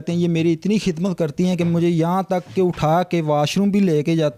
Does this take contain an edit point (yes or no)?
no